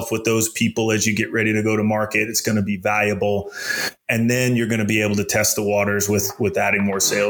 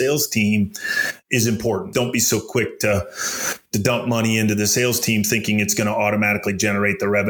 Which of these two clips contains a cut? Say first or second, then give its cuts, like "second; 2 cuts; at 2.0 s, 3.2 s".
second; 1 cut; at 1.9 s